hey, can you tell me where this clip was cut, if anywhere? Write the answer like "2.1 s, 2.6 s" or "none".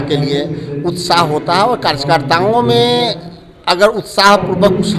none